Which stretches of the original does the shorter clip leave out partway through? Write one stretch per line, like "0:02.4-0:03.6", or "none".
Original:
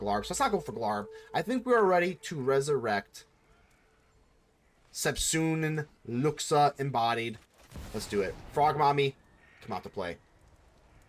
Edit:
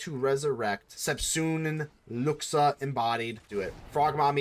0:03.1-0:04.9
0:07.4-0:08.0